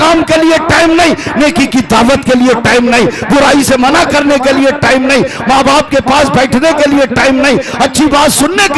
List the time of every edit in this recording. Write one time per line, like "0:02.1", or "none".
none